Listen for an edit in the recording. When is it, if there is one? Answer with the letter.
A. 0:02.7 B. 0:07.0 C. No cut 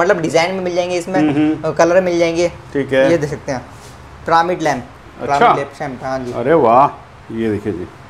C